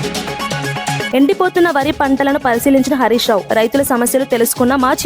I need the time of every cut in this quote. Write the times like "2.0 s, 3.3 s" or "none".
1.1 s

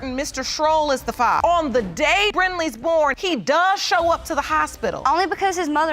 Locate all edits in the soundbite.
2.3 s

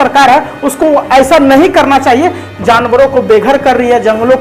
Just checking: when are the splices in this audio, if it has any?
2.4 s

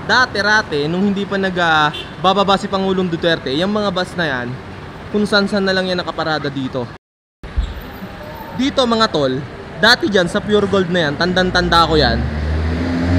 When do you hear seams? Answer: 7.1 s

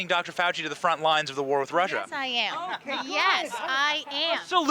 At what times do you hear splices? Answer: none

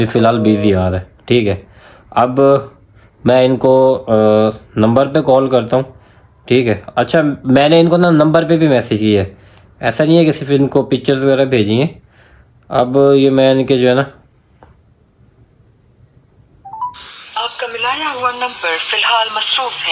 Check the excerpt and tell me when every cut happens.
none

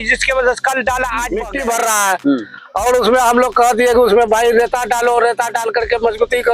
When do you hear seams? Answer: 1.4 s

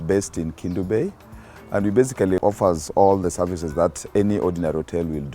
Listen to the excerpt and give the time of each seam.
2.4 s

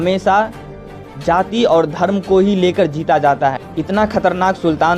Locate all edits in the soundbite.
3.7 s

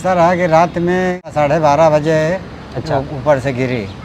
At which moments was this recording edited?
1.3 s

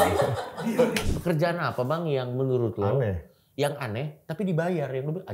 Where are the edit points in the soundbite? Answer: 1.1 s

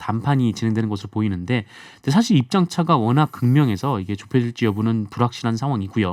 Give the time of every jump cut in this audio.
none

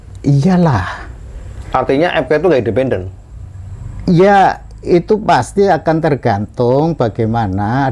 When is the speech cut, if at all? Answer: none

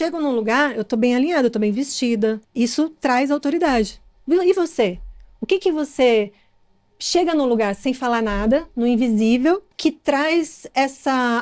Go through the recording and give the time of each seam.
2.4 s, 9.7 s

